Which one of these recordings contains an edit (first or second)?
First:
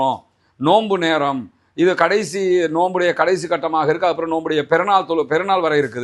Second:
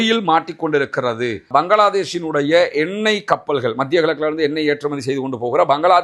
second